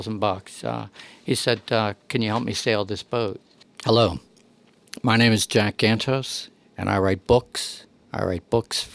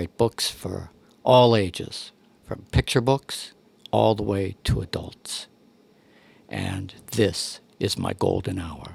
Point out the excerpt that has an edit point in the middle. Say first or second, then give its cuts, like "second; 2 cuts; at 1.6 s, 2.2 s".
first; 1 cut; at 3.5 s